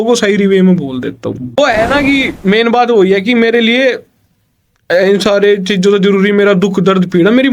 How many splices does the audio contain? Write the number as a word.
one